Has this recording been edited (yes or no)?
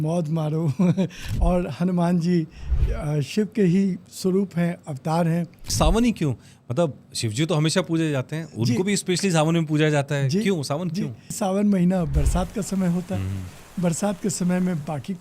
yes